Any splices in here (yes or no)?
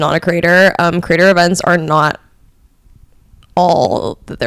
no